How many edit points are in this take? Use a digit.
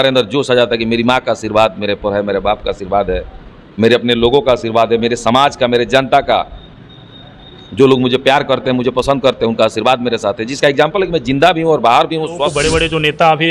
1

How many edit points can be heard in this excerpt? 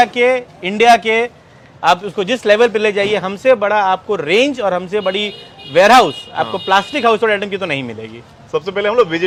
0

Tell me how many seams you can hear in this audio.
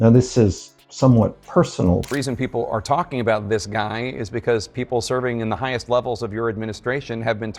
1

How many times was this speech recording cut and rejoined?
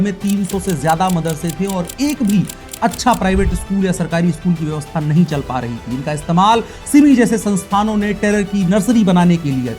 0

